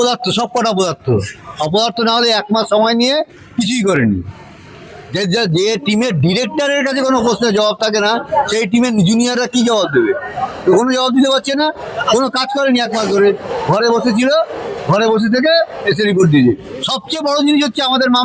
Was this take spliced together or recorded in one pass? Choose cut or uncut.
uncut